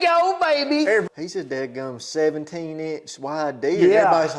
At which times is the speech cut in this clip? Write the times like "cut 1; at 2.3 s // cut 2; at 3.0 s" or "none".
cut 1; at 1.0 s